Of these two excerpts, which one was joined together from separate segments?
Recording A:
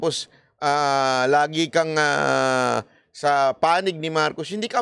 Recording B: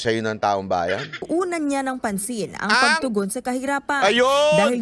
B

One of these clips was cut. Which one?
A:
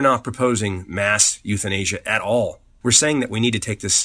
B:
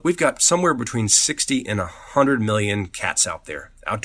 A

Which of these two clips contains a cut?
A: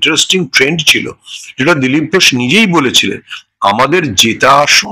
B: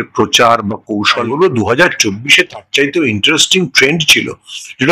B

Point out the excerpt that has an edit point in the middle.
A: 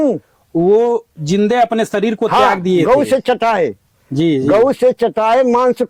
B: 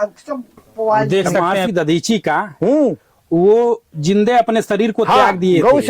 B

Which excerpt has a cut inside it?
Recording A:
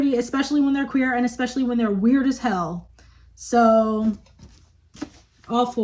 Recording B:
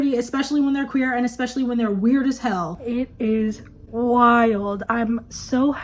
B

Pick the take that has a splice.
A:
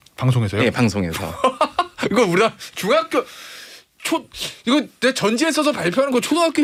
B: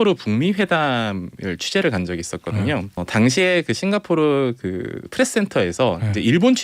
B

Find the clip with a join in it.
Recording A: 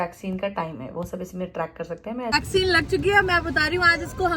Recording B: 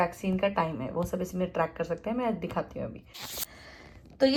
A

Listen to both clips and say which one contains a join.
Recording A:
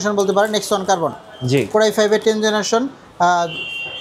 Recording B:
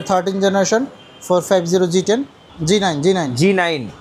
B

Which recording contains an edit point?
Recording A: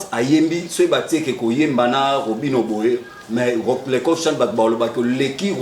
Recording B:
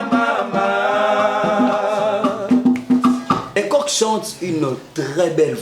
B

